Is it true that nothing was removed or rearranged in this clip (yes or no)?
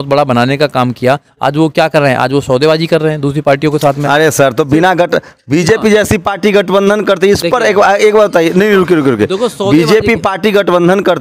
yes